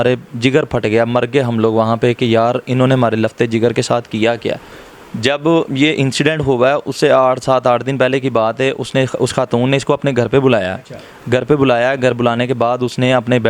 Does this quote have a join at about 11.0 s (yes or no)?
no